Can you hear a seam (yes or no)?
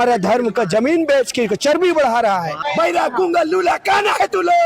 yes